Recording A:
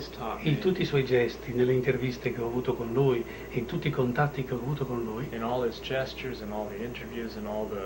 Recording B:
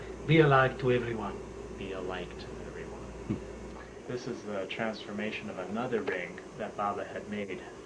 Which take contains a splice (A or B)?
B